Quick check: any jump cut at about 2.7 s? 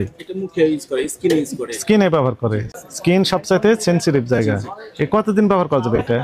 yes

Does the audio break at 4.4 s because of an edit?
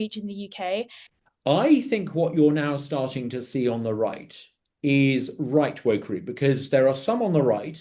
no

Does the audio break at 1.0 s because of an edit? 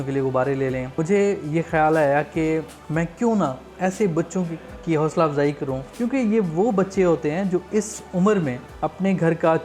yes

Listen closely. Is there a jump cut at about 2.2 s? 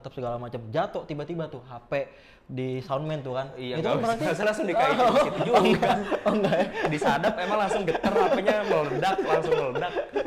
no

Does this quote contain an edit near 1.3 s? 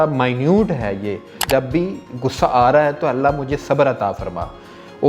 yes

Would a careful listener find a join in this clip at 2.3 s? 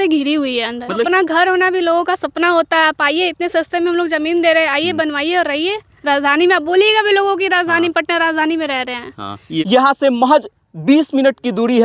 no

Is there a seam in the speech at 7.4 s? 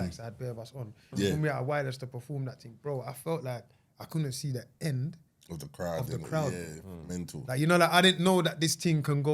yes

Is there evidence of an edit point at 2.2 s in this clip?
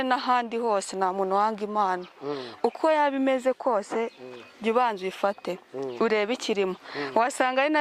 no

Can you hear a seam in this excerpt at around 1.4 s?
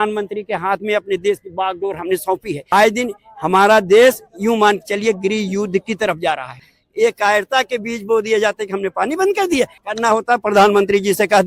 no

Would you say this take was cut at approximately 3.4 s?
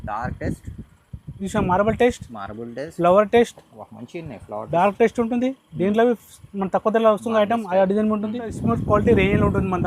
no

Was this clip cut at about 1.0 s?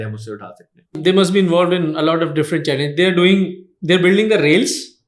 yes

